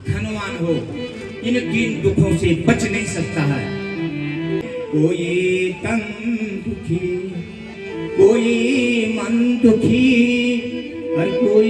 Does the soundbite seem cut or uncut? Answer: uncut